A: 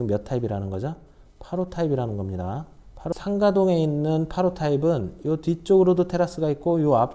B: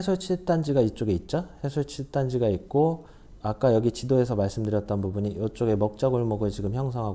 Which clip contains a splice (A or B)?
A